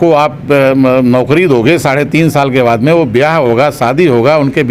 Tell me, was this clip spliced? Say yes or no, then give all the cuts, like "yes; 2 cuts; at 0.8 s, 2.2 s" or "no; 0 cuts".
no; 0 cuts